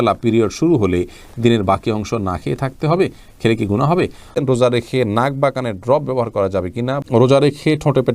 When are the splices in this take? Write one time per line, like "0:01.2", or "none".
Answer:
0:04.3
0:07.0